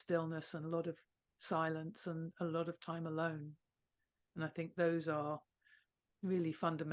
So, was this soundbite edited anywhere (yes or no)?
no